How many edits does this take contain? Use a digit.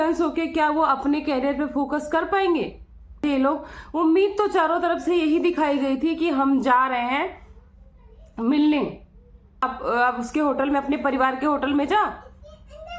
2